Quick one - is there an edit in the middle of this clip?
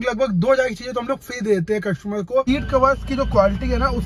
yes; 1 cut; at 2.5 s

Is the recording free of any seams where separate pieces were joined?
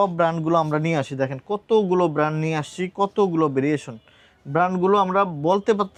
yes; 0 cuts

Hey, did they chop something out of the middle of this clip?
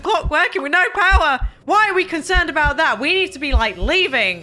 no; 0 cuts

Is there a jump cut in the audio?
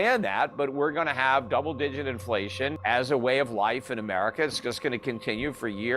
yes; 1 cut; at 2.8 s

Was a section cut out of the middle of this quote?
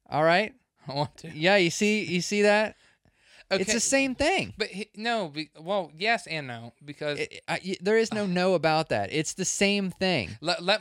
no; 0 cuts

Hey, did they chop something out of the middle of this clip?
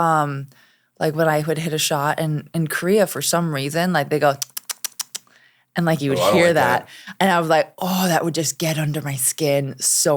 no; 0 cuts

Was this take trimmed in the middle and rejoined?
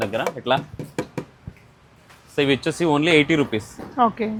no; 0 cuts

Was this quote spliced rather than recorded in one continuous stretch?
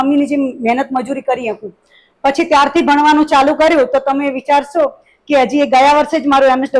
no; 0 cuts

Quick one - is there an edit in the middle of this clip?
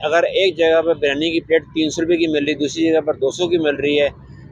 no; 0 cuts

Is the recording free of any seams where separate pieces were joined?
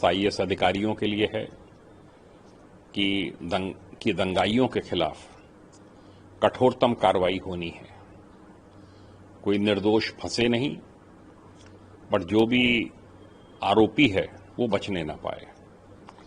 yes; 0 cuts

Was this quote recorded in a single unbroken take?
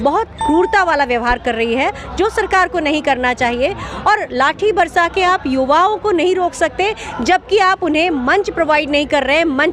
yes; 0 cuts

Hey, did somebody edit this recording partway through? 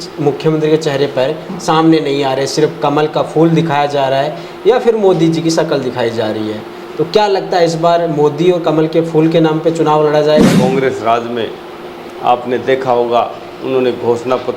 yes; 1 cut; at 10.6 s

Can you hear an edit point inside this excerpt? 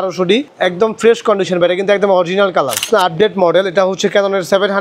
yes; 1 cut; at 2.9 s

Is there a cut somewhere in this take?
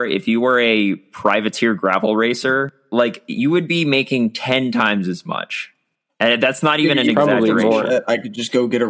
yes; 1 cut; at 2.8 s

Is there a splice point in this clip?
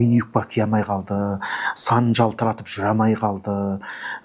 no; 0 cuts

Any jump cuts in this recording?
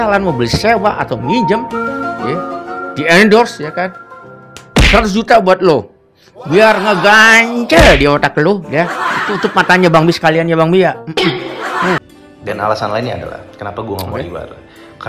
yes; 1 cut; at 12.1 s

